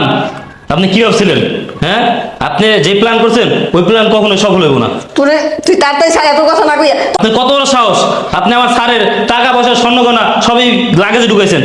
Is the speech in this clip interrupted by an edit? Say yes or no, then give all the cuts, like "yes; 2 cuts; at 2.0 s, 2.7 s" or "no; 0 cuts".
yes; 1 cut; at 7.1 s